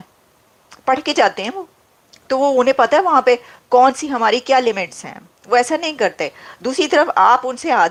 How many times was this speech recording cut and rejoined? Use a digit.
0